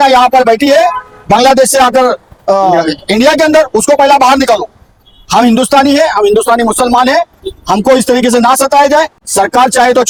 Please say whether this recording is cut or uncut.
uncut